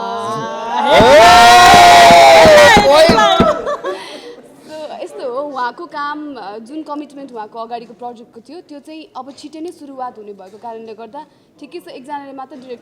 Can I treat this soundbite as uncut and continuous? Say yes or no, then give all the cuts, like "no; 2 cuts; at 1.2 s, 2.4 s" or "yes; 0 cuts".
yes; 0 cuts